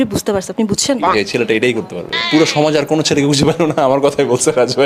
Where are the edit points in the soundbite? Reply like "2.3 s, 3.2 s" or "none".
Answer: 1.0 s, 2.2 s